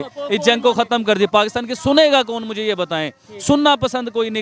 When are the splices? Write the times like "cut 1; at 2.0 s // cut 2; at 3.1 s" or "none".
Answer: none